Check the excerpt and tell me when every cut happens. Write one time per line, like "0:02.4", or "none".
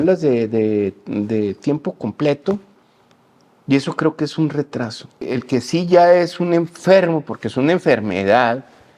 0:05.4